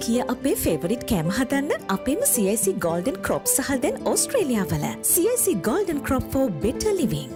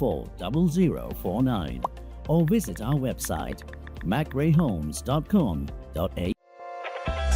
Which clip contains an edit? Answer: second; 1 cut; at 6.3 s

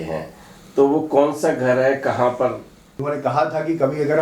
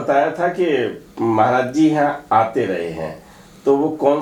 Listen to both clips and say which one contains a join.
first; 1 cut; at 3.1 s

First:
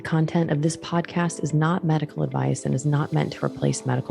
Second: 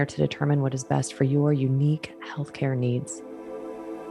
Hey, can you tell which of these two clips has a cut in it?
second; 1 cut; at 3.1 s

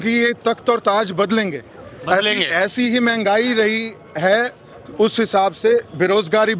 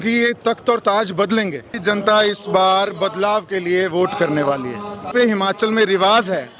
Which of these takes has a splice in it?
second; 2 cuts; at 1.7 s, 5.1 s

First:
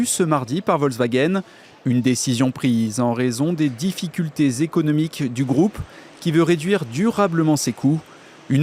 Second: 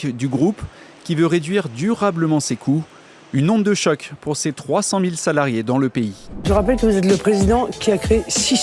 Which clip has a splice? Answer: second; 1 cut; at 6.3 s

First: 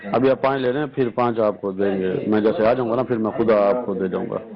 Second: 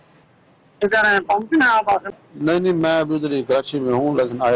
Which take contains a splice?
second; 1 cut; at 2.1 s

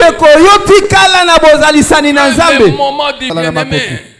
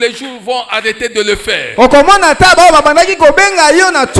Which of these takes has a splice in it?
first; 1 cut; at 3.3 s

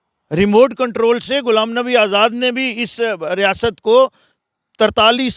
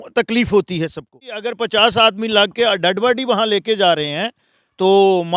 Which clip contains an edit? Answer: second; 1 cut; at 1.2 s

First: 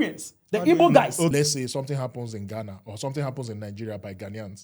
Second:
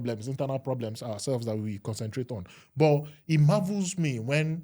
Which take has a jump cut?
first; 1 cut; at 1.3 s

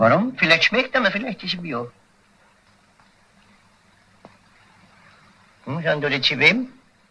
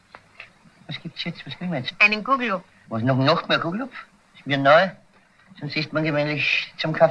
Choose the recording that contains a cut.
first; 1 cut; at 1.3 s

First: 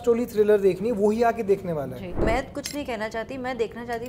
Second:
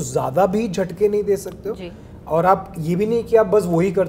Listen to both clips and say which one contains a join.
first; 1 cut; at 2.2 s

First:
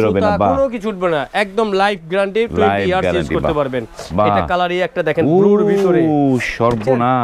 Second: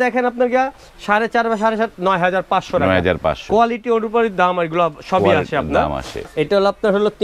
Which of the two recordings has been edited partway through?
second; 1 cut; at 6.2 s

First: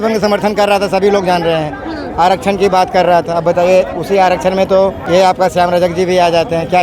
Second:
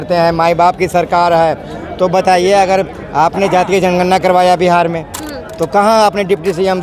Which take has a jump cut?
first; 1 cut; at 5.0 s

